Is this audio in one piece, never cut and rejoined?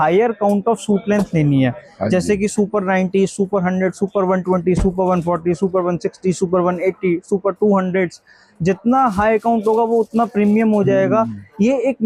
yes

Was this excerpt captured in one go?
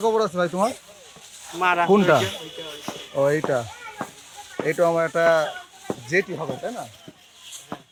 yes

